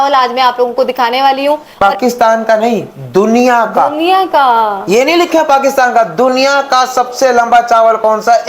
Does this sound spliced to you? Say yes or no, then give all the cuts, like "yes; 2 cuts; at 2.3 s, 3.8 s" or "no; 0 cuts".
yes; 1 cut; at 1.7 s